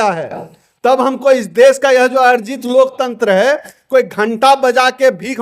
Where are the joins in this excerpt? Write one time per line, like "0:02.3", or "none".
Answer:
none